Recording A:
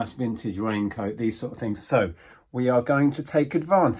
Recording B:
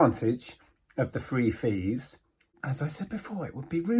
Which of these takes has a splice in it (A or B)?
B